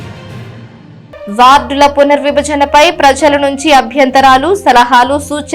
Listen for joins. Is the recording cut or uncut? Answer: cut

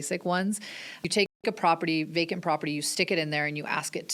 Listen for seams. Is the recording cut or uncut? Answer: cut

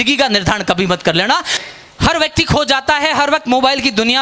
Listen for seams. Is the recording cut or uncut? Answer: cut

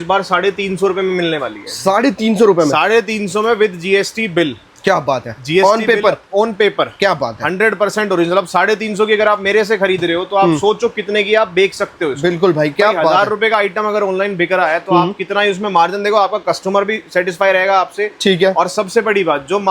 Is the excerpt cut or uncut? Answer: uncut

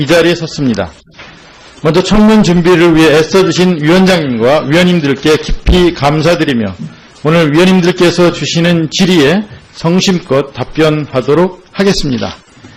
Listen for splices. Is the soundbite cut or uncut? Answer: uncut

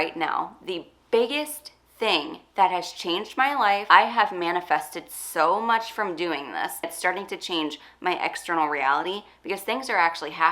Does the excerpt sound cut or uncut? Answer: cut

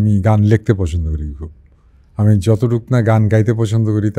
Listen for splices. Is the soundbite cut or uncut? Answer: uncut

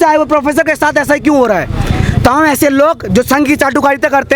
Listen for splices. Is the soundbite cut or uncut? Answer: uncut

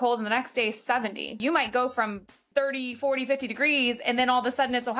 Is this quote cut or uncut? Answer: cut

